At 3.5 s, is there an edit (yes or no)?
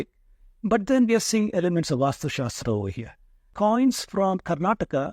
yes